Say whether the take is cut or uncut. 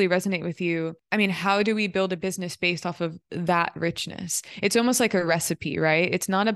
cut